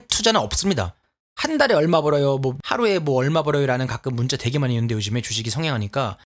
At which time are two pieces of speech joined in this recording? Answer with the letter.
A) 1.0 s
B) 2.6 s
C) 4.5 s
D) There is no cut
B